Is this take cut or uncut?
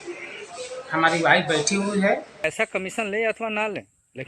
cut